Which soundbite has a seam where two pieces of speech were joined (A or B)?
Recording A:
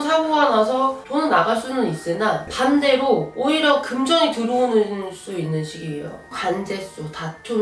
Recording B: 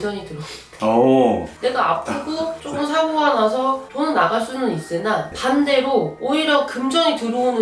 A